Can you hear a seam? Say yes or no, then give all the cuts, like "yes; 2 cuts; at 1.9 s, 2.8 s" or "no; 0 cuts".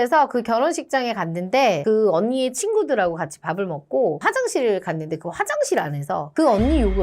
yes; 1 cut; at 1.8 s